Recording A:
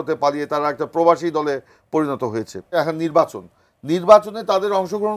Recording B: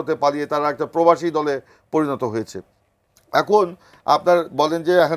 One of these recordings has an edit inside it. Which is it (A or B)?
A